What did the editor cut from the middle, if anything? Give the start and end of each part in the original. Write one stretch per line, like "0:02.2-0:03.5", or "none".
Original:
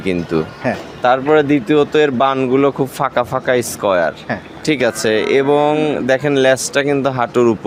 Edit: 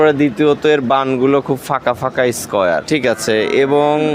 0:04.1-0:04.6